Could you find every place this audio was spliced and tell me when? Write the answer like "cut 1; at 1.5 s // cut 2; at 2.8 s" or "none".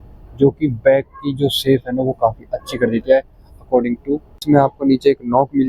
cut 1; at 4.4 s